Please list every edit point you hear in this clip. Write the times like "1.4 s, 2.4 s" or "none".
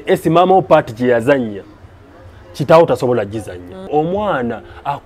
3.8 s